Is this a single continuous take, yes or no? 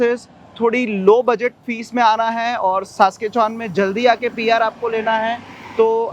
yes